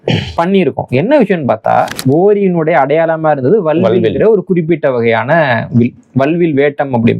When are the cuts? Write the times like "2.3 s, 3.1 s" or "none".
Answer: 2.0 s